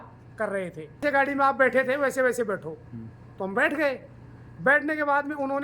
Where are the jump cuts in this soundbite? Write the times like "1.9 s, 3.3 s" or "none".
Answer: 1.0 s